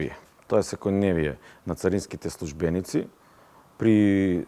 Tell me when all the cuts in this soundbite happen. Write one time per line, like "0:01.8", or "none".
none